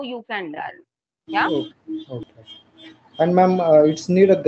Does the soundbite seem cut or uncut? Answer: cut